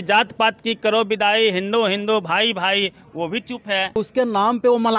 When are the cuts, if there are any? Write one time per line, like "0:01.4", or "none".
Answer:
0:04.0